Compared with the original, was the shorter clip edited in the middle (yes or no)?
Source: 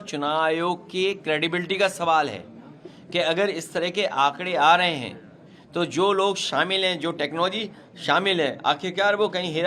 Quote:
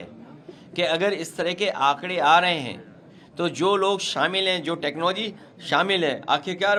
no